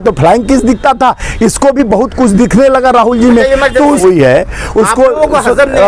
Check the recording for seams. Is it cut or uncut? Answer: cut